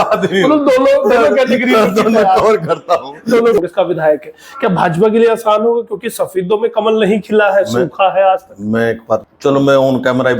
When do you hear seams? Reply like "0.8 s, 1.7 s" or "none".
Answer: 3.6 s, 9.3 s

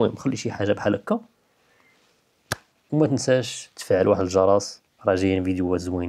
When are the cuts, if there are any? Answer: none

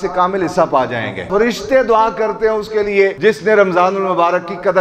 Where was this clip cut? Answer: 1.3 s, 3.2 s

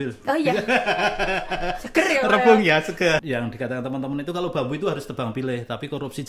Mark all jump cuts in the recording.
3.2 s

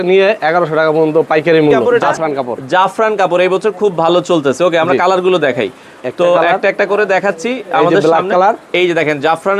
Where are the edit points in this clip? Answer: 1.9 s

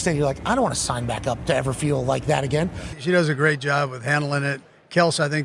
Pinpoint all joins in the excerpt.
2.9 s

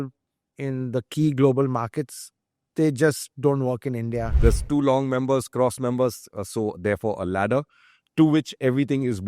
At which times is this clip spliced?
4.3 s

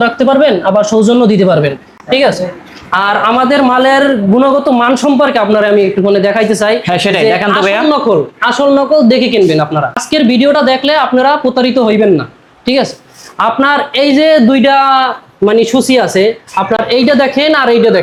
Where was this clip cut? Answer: none

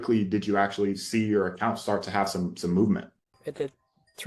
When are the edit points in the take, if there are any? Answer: 3.1 s

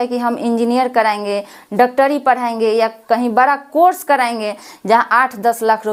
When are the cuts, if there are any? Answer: none

